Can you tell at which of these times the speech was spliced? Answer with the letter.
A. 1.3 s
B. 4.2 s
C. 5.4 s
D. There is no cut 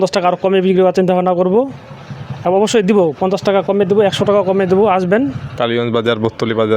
C